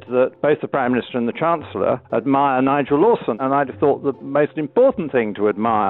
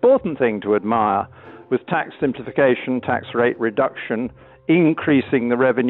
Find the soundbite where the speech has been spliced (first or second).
first